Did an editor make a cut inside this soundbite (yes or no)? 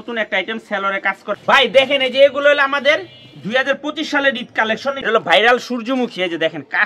yes